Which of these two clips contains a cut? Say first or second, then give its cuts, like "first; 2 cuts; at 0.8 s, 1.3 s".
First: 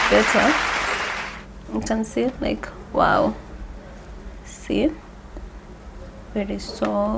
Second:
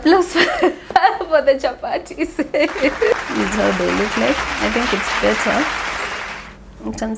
second; 1 cut; at 3.2 s